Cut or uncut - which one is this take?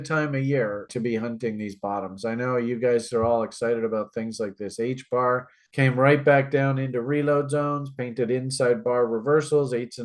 cut